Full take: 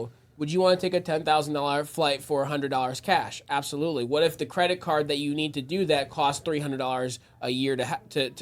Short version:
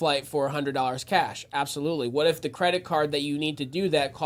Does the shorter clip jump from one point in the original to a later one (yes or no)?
no